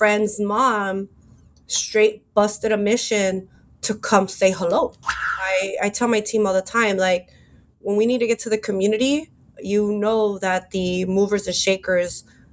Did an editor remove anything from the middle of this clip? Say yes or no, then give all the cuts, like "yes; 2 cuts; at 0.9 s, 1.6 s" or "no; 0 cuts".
yes; 1 cut; at 5.4 s